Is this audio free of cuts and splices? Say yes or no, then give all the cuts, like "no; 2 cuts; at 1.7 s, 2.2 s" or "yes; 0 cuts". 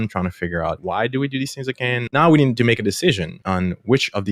no; 3 cuts; at 0.8 s, 2.1 s, 3.3 s